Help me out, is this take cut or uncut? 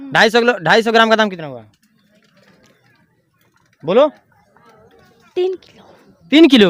uncut